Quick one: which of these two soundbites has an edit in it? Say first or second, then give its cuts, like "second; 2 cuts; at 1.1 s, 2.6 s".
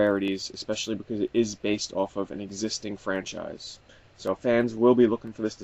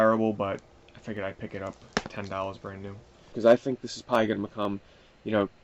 second; 1 cut; at 3.3 s